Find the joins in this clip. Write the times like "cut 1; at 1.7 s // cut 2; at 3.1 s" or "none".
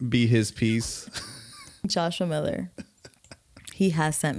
cut 1; at 1.8 s